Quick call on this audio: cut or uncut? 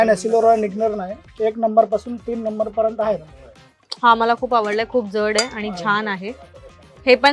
uncut